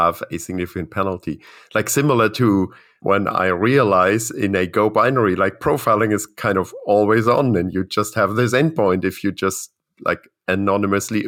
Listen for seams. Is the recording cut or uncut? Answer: uncut